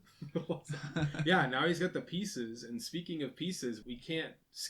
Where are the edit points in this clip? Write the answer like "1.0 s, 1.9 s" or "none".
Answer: 3.8 s